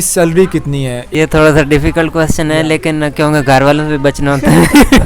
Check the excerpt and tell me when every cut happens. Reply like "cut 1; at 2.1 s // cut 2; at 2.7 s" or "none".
cut 1; at 1.0 s